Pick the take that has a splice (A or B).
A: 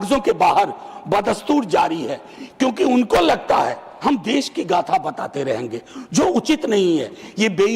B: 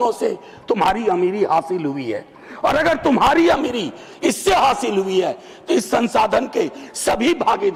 A